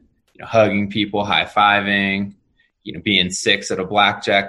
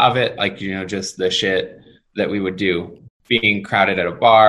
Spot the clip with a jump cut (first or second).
second